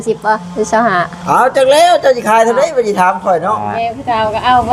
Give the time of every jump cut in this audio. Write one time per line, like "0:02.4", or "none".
0:03.7